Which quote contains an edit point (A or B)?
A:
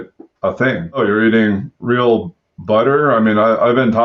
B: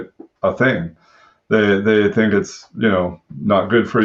A